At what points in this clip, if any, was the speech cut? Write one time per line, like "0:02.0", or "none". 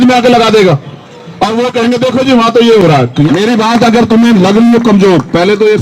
0:03.3